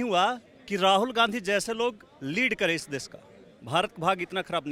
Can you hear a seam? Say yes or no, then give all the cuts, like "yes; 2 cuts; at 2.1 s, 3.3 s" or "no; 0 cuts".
no; 0 cuts